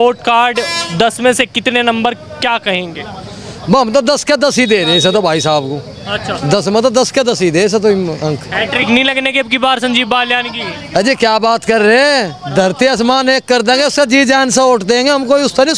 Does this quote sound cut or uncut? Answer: uncut